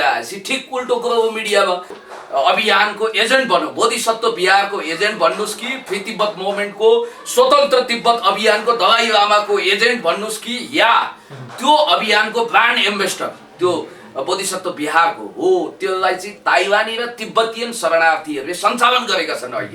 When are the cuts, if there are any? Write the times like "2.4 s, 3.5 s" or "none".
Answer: 2.0 s